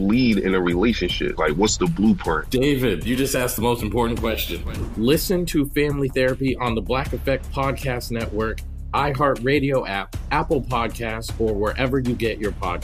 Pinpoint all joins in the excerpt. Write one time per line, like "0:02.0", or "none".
none